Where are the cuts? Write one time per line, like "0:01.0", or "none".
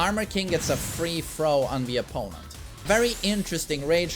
0:02.8